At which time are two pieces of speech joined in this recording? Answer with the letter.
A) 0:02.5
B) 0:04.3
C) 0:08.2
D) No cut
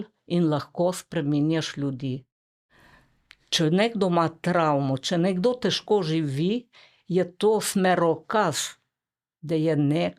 A